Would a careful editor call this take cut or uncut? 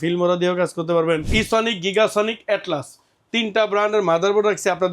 cut